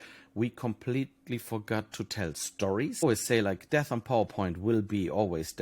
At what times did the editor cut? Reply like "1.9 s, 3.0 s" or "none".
3.0 s